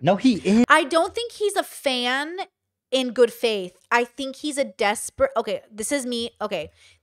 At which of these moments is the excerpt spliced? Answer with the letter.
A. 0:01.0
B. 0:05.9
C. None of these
C